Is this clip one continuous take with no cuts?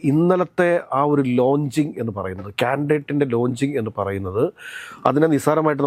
yes; 0 cuts

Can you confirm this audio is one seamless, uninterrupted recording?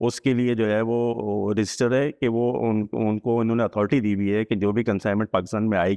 yes; 0 cuts

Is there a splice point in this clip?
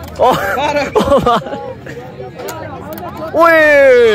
no; 0 cuts

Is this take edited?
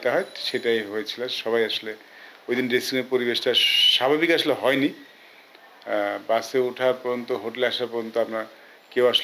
no; 0 cuts

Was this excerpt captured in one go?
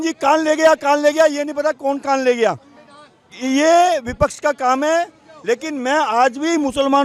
yes; 0 cuts

